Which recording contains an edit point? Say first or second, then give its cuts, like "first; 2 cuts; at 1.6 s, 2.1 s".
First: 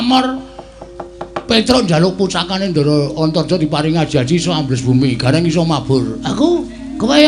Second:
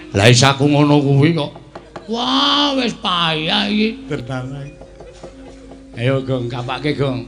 second; 1 cut; at 4.1 s